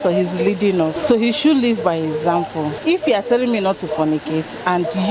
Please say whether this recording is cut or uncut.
cut